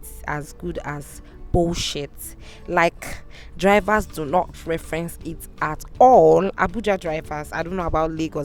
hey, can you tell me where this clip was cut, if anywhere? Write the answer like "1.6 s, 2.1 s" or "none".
none